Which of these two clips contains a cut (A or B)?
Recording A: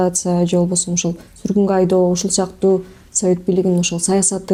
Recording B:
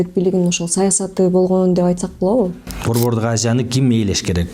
B